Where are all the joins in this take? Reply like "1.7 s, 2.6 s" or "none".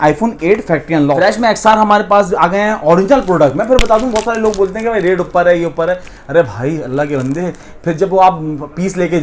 1.2 s